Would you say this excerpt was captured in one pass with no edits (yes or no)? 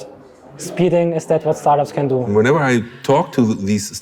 no